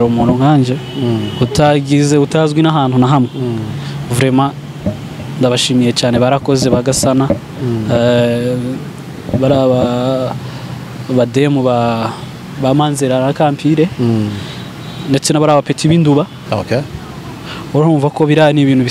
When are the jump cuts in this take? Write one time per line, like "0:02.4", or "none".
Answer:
0:16.4